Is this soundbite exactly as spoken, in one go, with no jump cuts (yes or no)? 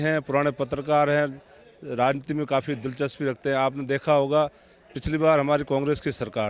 yes